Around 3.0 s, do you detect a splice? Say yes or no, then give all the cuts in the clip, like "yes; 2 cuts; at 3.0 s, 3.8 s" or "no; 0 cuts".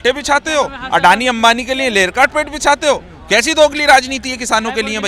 no; 0 cuts